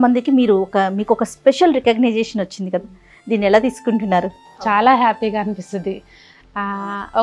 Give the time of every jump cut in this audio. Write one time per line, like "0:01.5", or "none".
0:04.5